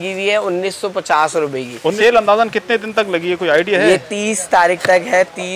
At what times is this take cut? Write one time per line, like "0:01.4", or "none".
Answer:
0:02.0